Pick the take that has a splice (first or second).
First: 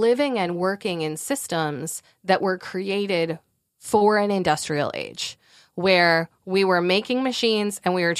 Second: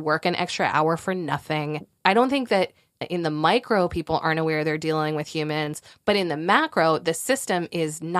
second